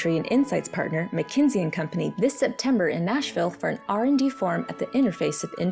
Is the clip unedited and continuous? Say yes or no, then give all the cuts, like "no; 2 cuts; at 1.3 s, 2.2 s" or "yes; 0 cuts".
yes; 0 cuts